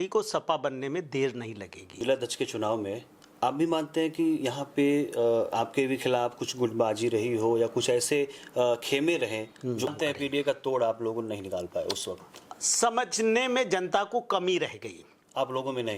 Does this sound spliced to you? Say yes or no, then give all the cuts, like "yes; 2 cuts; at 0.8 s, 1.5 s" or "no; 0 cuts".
yes; 2 cuts; at 1.9 s, 9.9 s